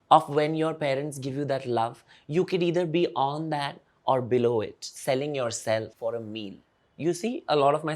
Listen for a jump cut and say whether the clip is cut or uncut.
cut